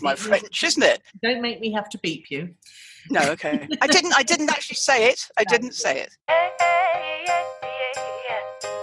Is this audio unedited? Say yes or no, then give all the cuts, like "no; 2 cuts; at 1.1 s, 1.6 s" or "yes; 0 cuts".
no; 1 cut; at 6.2 s